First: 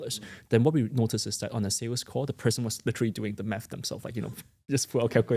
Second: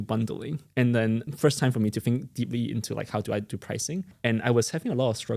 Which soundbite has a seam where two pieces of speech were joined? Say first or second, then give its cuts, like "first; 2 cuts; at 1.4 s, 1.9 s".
second; 2 cuts; at 1.3 s, 4.1 s